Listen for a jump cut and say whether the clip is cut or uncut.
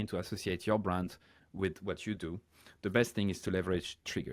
uncut